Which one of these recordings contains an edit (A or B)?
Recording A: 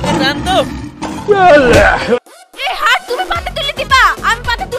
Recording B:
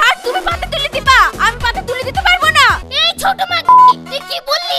B